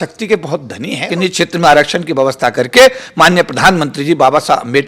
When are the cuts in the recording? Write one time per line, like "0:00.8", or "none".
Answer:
0:01.0

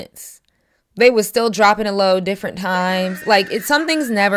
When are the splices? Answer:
none

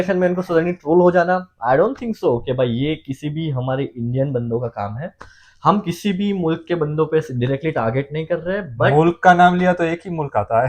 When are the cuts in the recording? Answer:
none

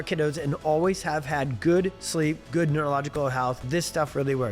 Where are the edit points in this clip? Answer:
0:03.6

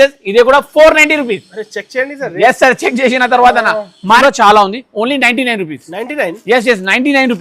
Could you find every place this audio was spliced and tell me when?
0:04.2

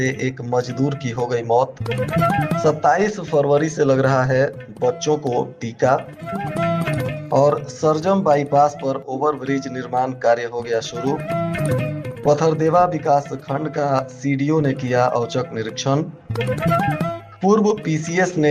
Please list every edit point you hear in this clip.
none

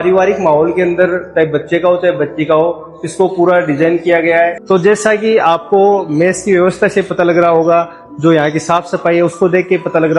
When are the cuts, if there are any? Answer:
0:04.6

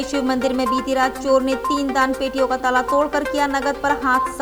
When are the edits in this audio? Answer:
none

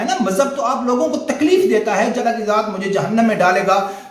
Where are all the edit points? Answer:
0:02.1

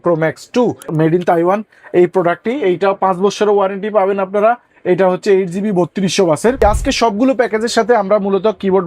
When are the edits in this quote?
0:00.9
0:06.6

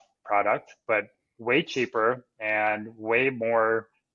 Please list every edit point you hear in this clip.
none

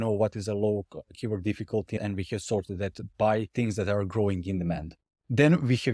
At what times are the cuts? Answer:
0:01.9
0:03.5

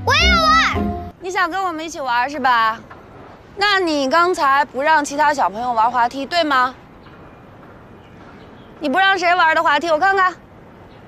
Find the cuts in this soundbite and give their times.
0:01.1

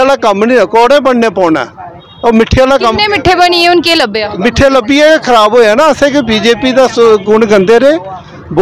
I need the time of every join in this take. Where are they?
none

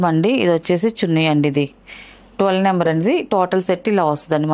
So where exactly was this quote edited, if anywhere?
none

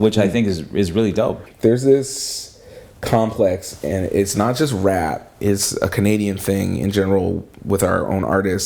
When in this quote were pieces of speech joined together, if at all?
0:01.4

